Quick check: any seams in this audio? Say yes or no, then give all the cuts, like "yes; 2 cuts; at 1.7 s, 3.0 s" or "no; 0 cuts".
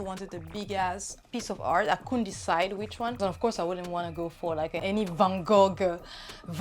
yes; 3 cuts; at 1.2 s, 3.2 s, 4.8 s